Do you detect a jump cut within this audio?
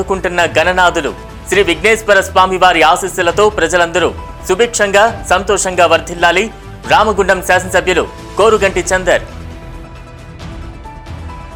no; 0 cuts

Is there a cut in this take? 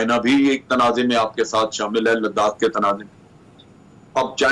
no; 0 cuts

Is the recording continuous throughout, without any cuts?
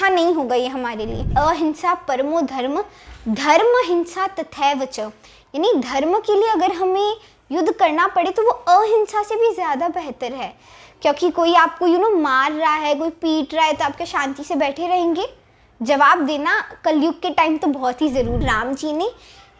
no; 2 cuts; at 1.3 s, 18.4 s

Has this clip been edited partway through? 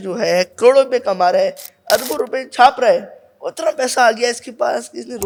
no; 0 cuts

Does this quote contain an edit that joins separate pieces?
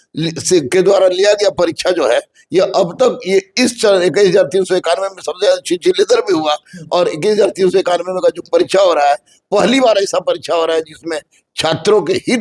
no; 0 cuts

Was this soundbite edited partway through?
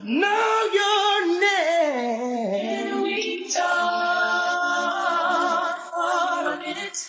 yes; 1 cut; at 2.8 s

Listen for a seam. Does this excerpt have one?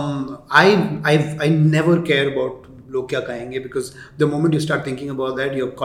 no; 0 cuts

